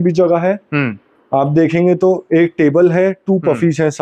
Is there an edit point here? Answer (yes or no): no